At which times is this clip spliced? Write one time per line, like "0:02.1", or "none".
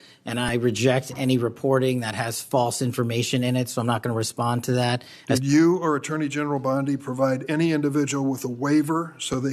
0:05.2